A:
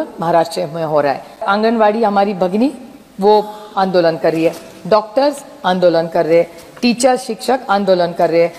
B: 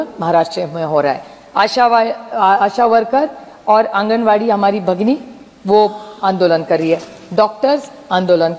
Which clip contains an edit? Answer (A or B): A